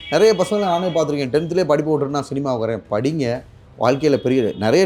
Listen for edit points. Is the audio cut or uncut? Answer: uncut